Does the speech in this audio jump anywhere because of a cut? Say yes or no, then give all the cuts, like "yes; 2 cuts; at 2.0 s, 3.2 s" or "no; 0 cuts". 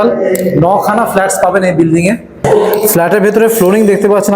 yes; 1 cut; at 2.5 s